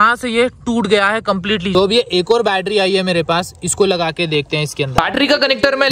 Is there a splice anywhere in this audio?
yes; 1 cut; at 1.7 s

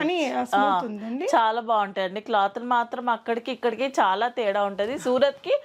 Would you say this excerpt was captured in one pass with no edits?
yes; 0 cuts

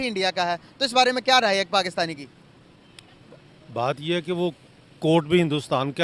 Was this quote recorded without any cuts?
yes; 0 cuts

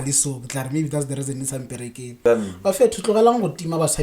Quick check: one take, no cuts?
no; 1 cut; at 2.2 s

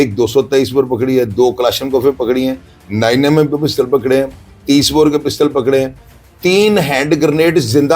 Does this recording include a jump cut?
no; 0 cuts

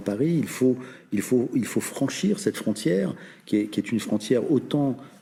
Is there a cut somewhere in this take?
no; 0 cuts

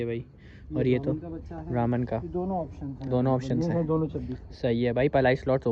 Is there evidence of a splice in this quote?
no; 0 cuts

